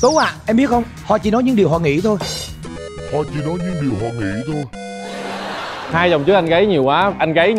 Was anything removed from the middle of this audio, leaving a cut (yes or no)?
yes